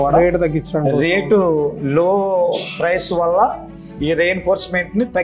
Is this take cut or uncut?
uncut